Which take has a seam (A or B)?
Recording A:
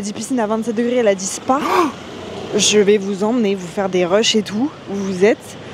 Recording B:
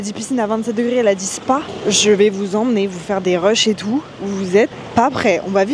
B